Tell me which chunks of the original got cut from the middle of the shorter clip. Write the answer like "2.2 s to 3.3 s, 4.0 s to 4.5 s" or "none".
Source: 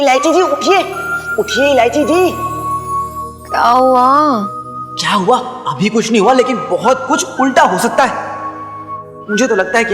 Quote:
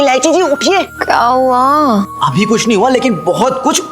0.9 s to 3.4 s, 4.6 s to 5.6 s